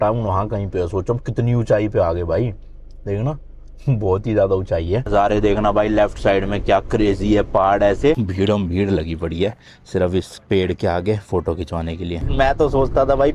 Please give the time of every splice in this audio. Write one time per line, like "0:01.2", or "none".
0:05.1
0:08.3
0:12.3

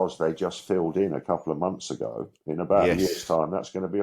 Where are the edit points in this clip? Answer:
none

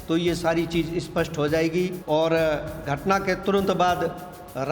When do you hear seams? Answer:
0:02.0

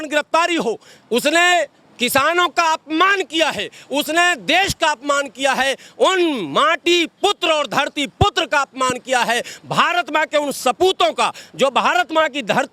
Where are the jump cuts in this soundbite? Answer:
none

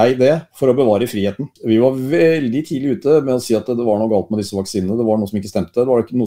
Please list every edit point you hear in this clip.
0:01.5

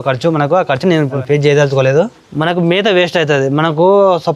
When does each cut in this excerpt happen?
0:01.1
0:02.1

